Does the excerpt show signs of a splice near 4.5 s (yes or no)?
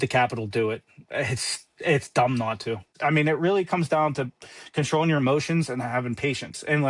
no